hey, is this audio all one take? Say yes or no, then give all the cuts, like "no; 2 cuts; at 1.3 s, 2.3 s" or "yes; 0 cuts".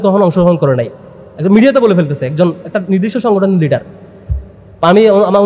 yes; 0 cuts